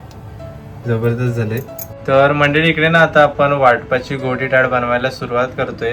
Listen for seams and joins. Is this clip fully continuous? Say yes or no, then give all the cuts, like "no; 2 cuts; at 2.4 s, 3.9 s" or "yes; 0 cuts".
yes; 0 cuts